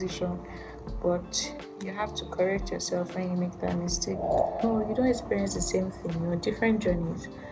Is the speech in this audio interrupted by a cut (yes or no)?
yes